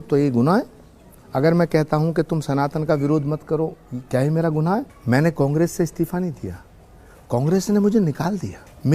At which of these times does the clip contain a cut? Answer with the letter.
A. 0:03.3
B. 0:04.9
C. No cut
B